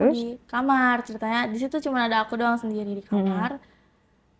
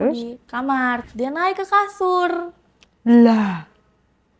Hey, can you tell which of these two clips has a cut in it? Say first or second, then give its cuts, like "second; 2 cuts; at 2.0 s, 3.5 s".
second; 1 cut; at 1.1 s